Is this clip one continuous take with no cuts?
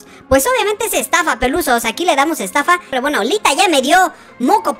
no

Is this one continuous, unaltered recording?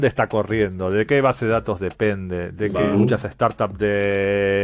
no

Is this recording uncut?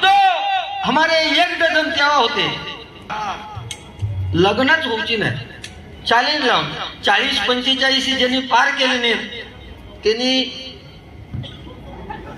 no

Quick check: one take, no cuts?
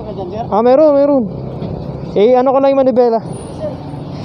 no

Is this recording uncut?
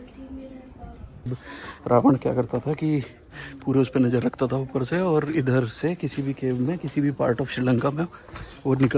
no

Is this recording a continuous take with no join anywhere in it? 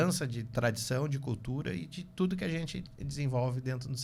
yes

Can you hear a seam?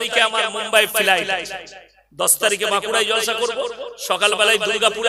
no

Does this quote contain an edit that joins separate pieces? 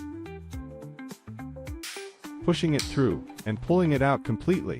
yes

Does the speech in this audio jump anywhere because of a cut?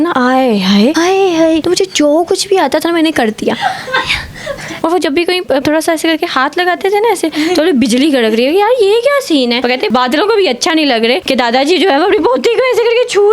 yes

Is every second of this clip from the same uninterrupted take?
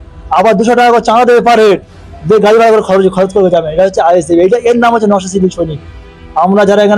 yes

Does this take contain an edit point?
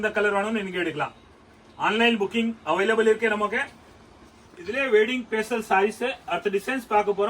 no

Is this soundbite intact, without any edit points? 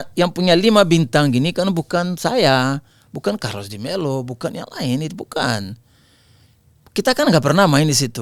yes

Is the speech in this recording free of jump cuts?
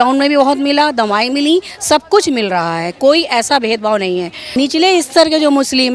no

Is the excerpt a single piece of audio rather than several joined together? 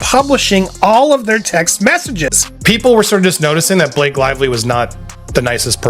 no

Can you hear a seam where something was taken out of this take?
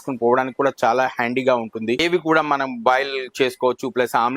yes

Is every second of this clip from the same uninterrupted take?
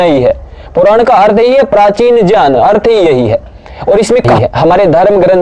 no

